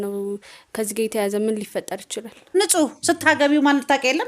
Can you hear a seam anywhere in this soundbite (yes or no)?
yes